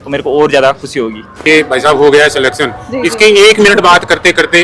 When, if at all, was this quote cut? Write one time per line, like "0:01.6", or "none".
0:01.3